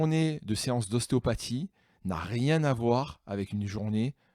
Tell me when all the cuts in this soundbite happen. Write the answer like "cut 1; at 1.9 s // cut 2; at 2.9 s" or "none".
none